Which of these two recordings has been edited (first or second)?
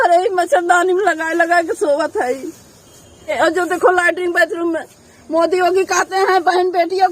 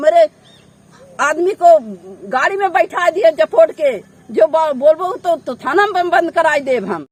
first